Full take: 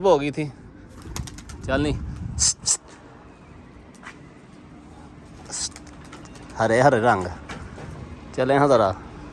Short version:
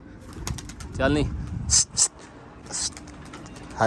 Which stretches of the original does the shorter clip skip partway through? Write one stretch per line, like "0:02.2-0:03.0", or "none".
0:03.3-0:05.4